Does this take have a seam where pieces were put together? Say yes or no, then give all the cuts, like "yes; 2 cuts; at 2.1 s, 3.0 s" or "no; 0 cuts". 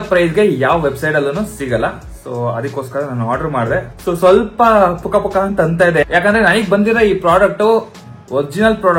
no; 0 cuts